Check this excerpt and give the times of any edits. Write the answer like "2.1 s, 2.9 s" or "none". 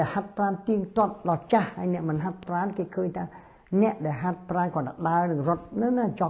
none